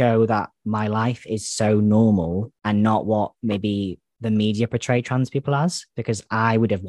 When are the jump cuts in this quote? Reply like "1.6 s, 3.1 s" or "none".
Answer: none

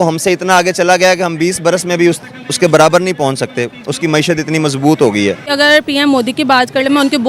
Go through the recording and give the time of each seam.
5.5 s

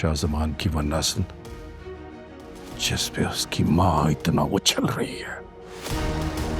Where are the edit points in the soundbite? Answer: none

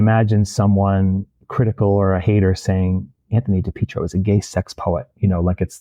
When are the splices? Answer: 1.4 s

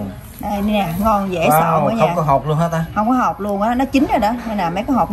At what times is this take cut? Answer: none

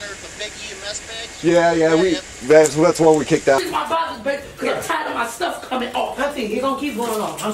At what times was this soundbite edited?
3.6 s

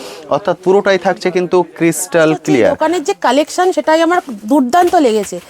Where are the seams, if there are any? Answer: 2.8 s

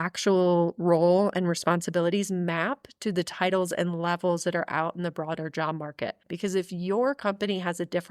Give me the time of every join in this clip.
6.3 s

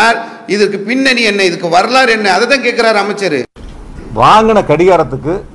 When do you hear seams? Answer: none

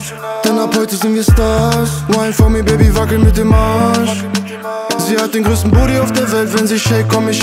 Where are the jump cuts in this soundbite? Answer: none

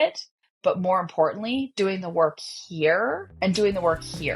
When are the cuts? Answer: 3.3 s

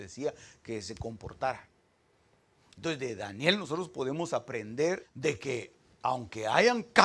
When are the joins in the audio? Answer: 5.1 s

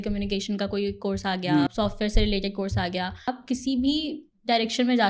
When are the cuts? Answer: 1.7 s, 3.3 s

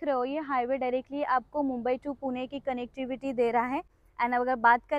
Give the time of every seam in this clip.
4.0 s

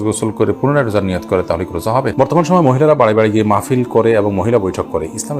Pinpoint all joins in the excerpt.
1.8 s

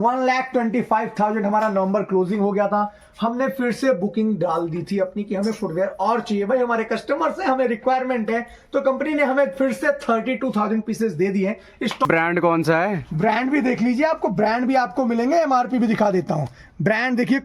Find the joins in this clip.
12.1 s

